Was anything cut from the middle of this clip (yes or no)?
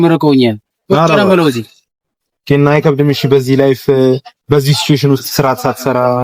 no